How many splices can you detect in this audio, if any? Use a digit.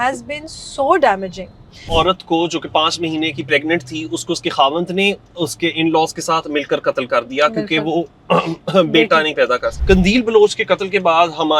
2